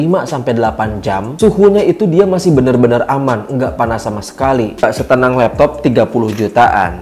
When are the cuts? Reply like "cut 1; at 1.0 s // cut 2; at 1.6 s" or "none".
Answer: cut 1; at 4.8 s